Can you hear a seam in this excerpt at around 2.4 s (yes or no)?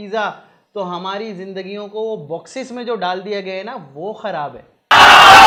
no